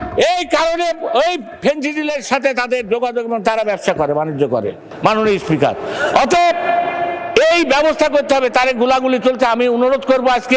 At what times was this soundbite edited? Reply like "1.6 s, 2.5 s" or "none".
none